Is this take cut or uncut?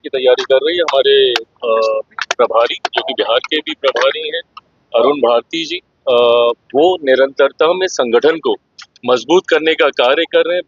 uncut